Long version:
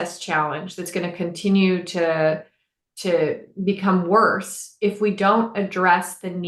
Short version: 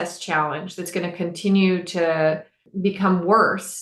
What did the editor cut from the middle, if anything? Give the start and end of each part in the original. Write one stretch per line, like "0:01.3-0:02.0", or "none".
0:02.6-0:03.5